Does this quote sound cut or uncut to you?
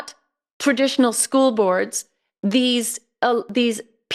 uncut